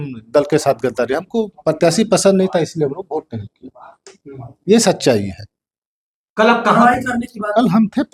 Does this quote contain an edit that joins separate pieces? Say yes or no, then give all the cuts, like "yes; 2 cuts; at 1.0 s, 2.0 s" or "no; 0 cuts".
no; 0 cuts